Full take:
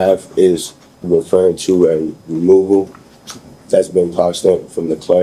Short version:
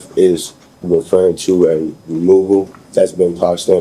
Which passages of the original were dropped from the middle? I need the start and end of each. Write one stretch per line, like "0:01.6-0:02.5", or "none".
0:03.0-0:03.5

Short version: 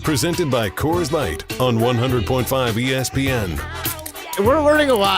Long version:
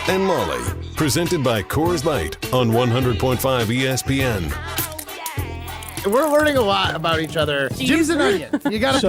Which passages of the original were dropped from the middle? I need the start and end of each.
0:05.2-0:05.9

